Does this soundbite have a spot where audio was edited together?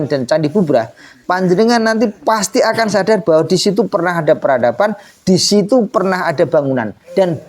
no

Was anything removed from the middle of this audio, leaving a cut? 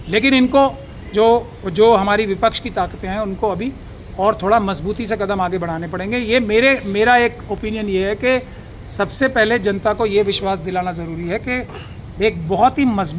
no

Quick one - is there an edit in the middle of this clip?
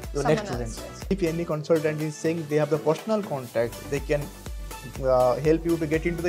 yes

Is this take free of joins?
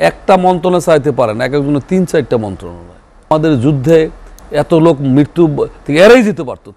no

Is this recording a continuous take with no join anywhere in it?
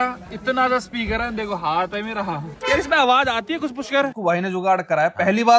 no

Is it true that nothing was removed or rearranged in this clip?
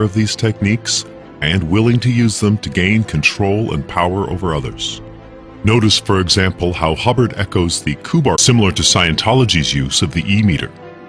yes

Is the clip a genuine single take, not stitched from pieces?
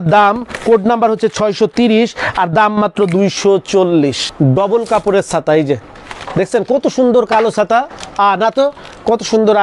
no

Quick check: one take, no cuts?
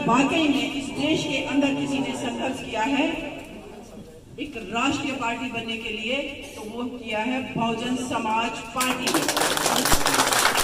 yes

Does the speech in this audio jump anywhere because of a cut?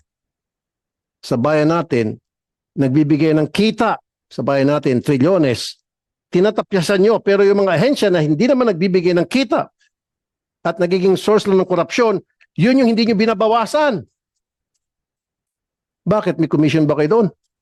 no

